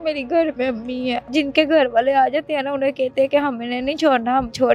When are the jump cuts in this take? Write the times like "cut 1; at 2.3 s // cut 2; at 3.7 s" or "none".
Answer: cut 1; at 1.2 s